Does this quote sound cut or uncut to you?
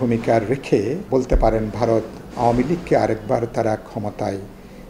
cut